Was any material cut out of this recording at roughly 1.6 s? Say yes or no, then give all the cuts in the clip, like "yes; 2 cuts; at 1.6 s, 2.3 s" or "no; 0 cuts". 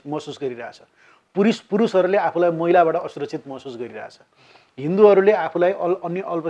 no; 0 cuts